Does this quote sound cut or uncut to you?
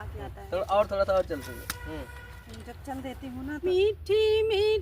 cut